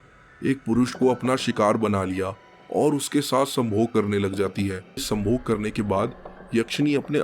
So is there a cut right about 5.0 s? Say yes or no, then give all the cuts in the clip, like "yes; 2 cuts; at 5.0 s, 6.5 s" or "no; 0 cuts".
yes; 1 cut; at 5.0 s